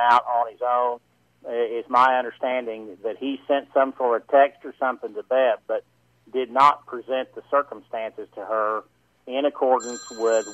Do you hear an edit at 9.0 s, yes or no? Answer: no